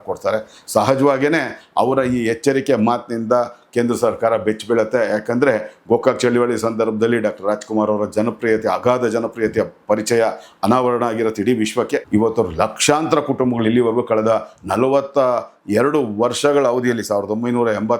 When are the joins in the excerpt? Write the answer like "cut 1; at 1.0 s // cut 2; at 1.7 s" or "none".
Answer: cut 1; at 12.0 s